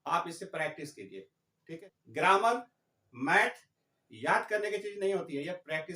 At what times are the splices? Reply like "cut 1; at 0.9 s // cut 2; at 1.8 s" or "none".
cut 1; at 1.8 s